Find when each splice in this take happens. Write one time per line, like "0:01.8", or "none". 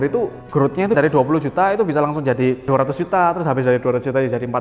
0:01.0
0:02.7